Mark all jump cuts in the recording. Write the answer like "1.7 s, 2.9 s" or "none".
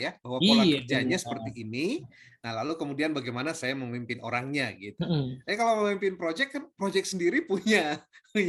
none